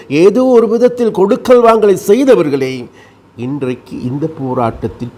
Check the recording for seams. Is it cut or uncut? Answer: uncut